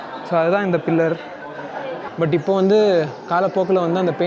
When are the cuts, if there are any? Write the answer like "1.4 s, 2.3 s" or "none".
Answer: 2.0 s